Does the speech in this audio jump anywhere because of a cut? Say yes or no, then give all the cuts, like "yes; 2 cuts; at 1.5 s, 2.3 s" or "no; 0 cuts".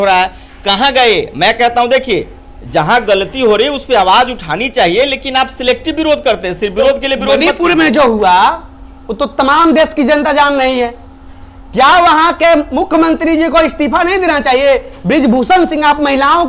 no; 0 cuts